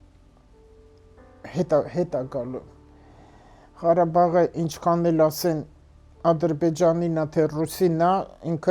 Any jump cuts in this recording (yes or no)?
no